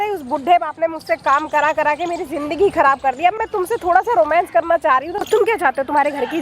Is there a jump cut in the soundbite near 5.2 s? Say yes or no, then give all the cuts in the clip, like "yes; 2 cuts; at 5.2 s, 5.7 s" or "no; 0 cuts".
yes; 1 cut; at 5.2 s